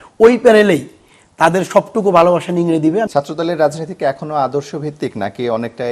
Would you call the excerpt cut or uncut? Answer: cut